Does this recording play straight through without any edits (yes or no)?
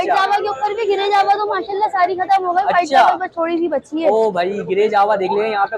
yes